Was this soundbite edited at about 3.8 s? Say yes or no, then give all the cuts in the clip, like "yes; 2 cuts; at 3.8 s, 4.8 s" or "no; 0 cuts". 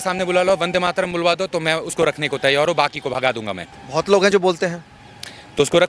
no; 0 cuts